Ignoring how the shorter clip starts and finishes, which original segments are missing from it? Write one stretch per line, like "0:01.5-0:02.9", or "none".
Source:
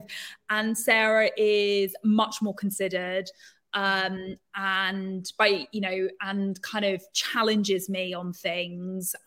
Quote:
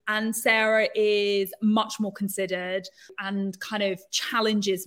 0:03.6-0:06.2